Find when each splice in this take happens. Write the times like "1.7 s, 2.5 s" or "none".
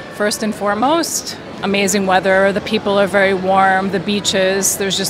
none